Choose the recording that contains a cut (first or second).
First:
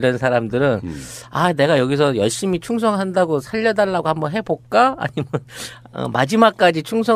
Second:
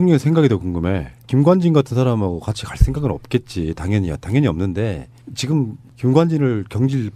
second